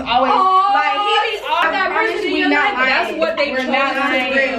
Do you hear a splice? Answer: yes; 1 cut; at 1.6 s

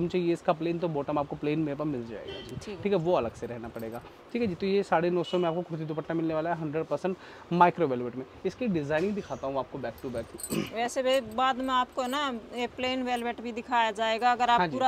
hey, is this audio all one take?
yes; 0 cuts

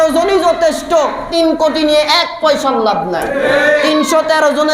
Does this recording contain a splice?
yes; 1 cut; at 1.3 s

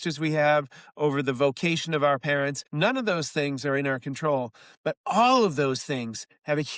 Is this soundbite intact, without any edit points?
no; 1 cut; at 2.6 s

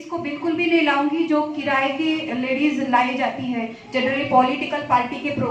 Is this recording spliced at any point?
no; 0 cuts

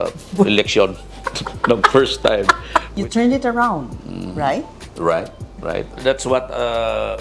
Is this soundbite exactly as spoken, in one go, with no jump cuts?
yes; 0 cuts

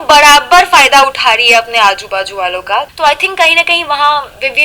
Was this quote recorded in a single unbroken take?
no; 1 cut; at 2.9 s

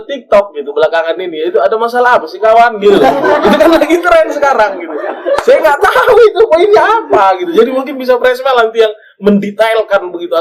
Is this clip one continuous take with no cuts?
yes; 0 cuts

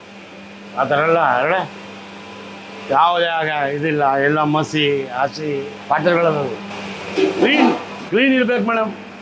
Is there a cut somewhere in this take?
no; 0 cuts

